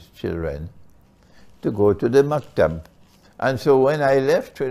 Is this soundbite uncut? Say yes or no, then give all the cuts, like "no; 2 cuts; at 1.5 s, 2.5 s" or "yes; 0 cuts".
no; 1 cut; at 3.2 s